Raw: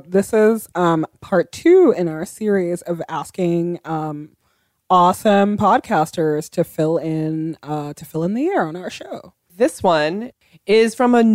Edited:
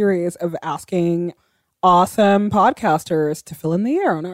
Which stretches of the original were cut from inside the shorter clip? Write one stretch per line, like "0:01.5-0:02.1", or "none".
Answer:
0:03.8-0:04.4
0:06.5-0:07.9